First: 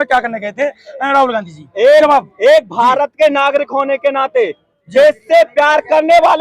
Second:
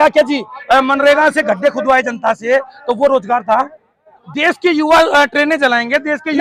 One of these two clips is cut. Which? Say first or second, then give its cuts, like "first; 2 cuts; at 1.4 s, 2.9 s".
second; 1 cut; at 4.2 s